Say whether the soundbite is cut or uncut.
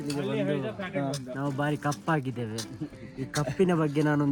uncut